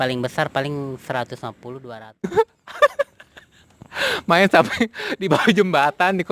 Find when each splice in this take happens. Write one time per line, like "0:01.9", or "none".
0:02.3